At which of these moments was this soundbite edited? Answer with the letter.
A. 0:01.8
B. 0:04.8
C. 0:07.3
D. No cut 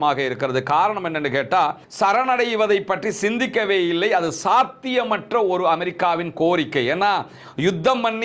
A